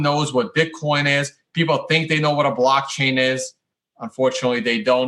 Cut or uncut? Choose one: uncut